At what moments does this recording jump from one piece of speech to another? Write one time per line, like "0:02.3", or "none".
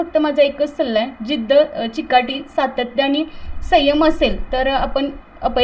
none